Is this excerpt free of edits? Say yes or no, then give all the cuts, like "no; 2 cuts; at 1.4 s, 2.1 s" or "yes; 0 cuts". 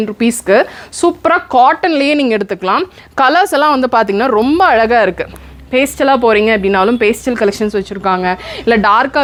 yes; 0 cuts